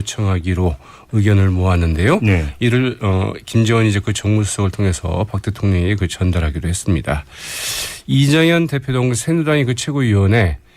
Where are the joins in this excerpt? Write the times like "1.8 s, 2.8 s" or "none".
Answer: 7.2 s